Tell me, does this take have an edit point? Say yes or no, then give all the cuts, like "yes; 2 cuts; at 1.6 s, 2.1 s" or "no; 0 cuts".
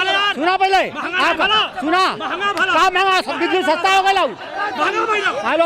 no; 0 cuts